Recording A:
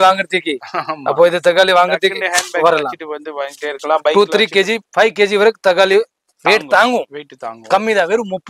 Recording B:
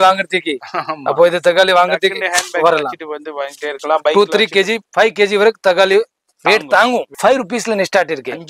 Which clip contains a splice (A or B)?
B